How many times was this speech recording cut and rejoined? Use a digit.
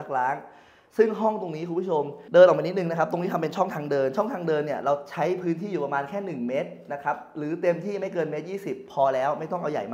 1